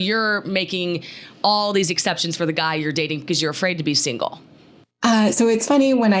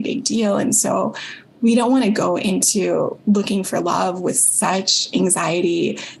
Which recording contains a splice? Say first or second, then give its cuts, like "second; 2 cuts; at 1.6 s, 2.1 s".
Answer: first; 1 cut; at 4.9 s